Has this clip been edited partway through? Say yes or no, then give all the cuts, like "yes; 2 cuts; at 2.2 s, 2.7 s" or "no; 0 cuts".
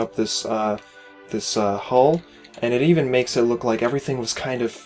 no; 0 cuts